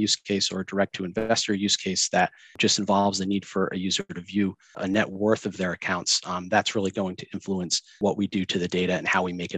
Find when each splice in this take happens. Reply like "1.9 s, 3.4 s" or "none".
2.6 s, 4.8 s, 7.9 s